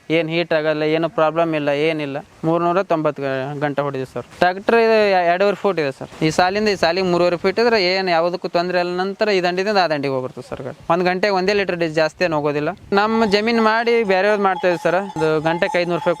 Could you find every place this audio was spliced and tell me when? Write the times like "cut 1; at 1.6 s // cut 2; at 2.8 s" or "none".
cut 1; at 2.2 s // cut 2; at 4.2 s // cut 3; at 6.1 s // cut 4; at 10.8 s // cut 5; at 12.9 s // cut 6; at 15.1 s